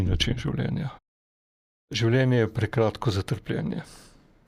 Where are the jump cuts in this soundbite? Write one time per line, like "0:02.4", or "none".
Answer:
0:01.5